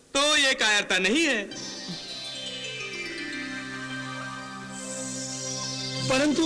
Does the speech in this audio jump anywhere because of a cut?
no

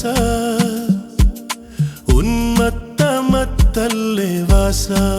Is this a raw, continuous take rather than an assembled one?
yes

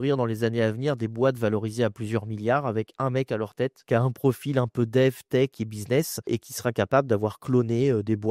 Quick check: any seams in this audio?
yes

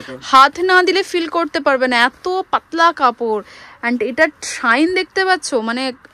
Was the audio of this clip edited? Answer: no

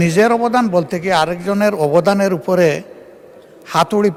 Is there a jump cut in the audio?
no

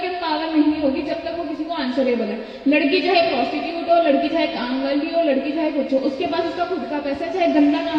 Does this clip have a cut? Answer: no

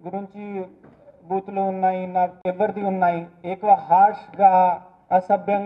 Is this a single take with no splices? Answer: no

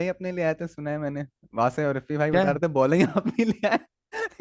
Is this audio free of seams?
yes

